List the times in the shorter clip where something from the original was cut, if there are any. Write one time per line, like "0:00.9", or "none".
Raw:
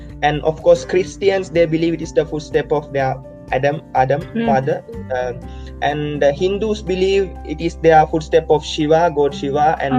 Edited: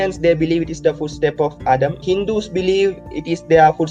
0:02.0